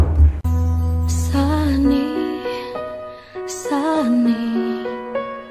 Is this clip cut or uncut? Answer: uncut